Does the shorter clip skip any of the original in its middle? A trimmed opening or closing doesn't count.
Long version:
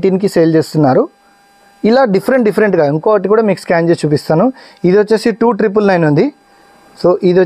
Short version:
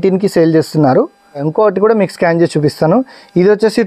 yes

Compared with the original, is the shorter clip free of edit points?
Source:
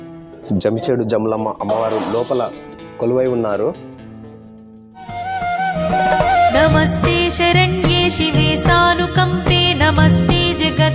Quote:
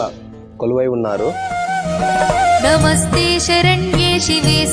no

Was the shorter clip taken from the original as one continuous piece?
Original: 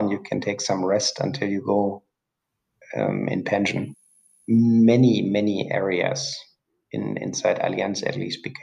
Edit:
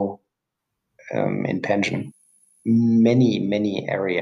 yes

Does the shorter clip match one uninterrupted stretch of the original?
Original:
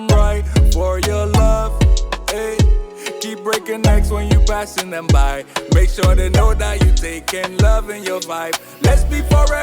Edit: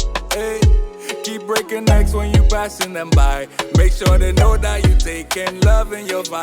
yes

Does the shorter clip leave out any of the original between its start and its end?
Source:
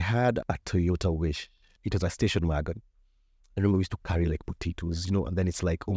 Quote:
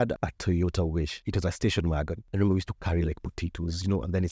yes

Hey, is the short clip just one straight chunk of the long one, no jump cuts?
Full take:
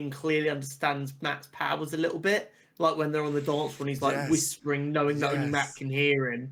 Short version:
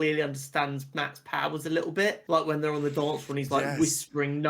no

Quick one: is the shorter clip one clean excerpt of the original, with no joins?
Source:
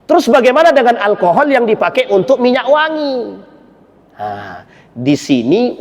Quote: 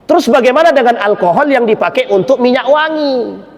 yes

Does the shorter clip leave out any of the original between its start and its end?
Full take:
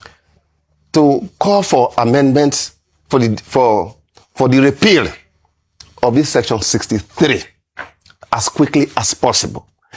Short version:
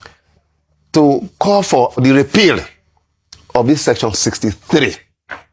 yes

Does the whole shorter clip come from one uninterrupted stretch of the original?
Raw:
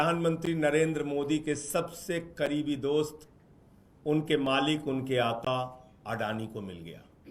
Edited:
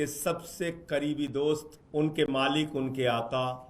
no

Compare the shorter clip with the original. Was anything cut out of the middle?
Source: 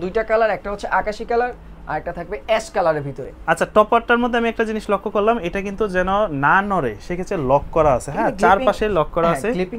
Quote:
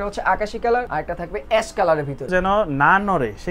yes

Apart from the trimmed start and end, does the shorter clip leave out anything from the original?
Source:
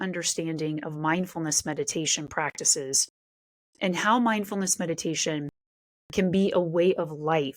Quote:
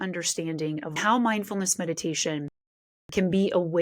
yes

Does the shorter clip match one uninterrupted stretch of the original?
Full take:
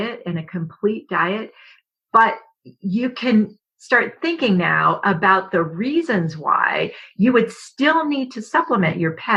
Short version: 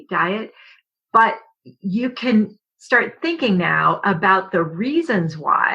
yes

